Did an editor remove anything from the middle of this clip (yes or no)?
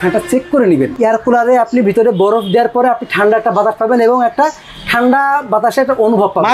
yes